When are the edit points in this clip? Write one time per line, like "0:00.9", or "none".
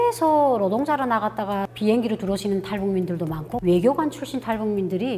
0:01.7